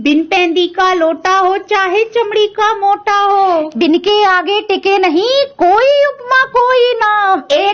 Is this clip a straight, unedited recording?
yes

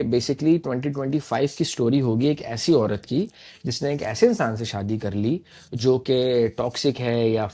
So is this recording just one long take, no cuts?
yes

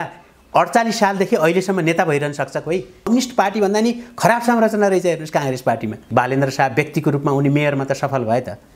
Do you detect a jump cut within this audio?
yes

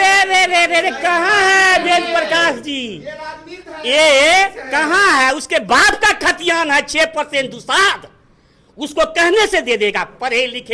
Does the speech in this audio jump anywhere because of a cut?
no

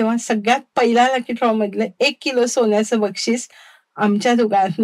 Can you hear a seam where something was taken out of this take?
no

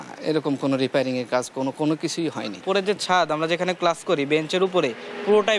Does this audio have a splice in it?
yes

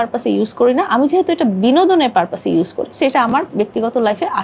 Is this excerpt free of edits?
yes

